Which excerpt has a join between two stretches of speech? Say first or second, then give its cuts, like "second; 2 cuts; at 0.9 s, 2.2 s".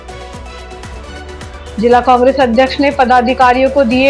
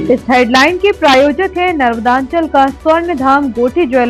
first; 1 cut; at 0.9 s